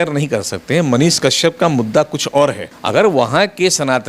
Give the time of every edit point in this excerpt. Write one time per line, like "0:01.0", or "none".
0:02.7